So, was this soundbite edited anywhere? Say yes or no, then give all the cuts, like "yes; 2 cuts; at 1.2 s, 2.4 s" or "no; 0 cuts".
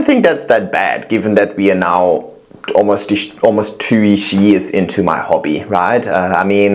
no; 0 cuts